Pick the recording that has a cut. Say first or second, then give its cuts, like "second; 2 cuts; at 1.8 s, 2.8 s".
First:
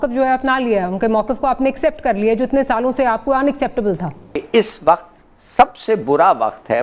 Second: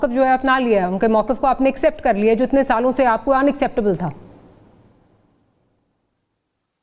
first; 1 cut; at 4.4 s